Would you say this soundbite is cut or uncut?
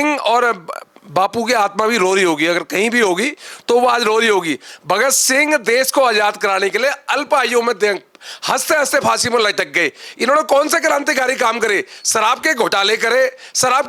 uncut